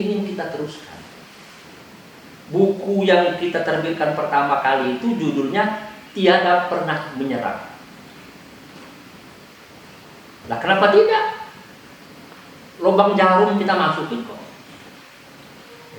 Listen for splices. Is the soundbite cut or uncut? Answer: cut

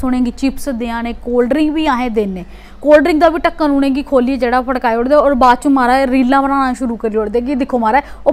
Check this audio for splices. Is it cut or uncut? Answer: uncut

